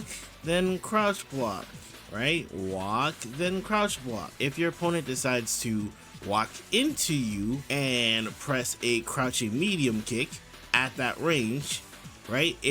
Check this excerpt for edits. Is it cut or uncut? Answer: cut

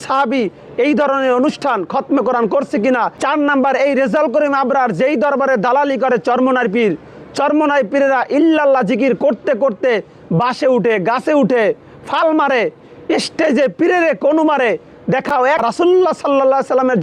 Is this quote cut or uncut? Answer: cut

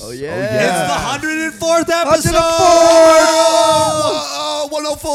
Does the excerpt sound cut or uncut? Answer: uncut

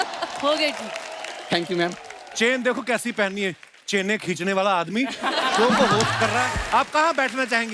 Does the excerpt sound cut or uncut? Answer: cut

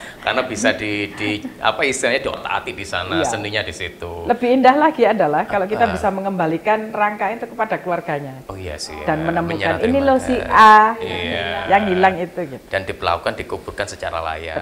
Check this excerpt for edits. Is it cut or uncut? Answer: uncut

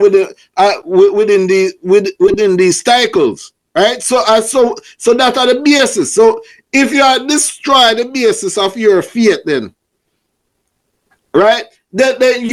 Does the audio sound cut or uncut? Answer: uncut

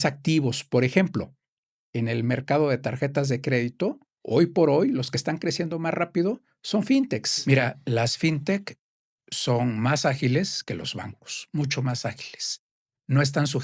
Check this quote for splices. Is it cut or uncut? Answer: cut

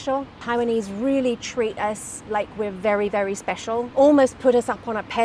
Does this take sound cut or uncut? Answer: uncut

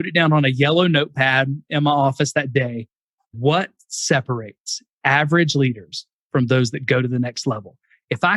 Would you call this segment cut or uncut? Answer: cut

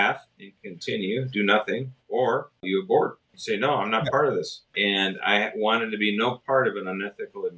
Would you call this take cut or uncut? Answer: cut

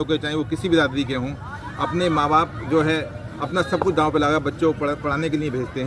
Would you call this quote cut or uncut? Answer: uncut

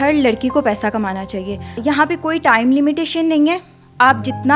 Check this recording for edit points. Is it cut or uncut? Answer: cut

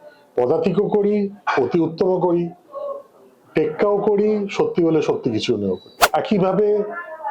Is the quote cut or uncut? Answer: cut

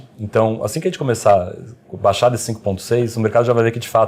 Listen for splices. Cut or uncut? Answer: uncut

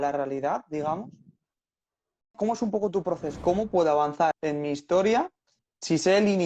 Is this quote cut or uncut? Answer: cut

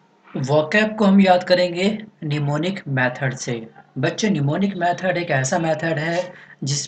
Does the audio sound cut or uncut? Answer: cut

